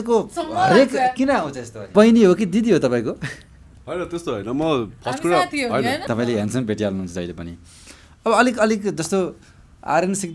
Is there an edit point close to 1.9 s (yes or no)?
yes